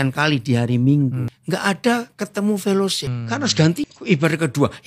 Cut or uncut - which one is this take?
cut